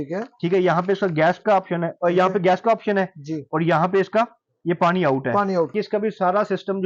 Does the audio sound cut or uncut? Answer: cut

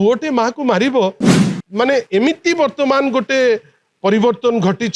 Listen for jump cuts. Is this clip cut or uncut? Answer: cut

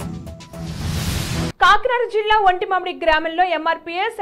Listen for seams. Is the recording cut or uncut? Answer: uncut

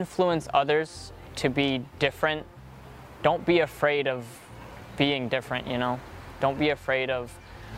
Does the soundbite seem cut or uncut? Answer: uncut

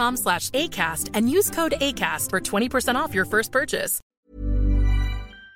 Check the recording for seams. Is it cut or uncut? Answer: cut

